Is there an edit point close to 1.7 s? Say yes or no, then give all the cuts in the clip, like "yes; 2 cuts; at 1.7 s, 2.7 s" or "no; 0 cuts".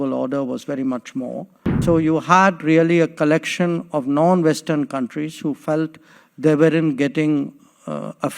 yes; 1 cut; at 1.7 s